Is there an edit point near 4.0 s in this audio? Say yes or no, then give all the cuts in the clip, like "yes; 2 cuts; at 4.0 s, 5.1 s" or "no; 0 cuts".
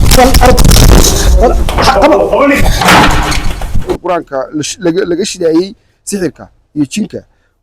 yes; 1 cut; at 4.0 s